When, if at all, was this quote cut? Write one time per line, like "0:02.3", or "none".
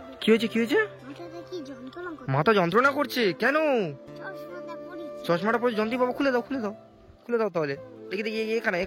none